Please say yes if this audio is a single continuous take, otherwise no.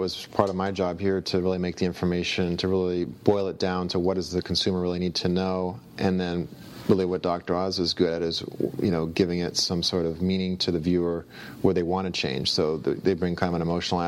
yes